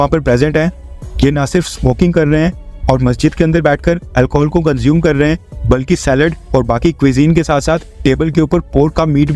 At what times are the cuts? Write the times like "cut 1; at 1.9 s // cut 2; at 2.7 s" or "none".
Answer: none